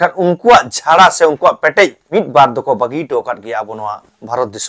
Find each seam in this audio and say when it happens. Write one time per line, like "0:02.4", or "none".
0:02.0